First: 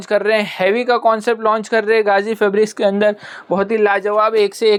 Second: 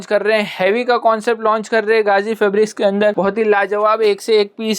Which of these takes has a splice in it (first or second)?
second